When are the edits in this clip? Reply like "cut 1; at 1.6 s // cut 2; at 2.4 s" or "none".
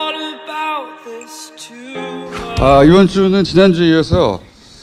none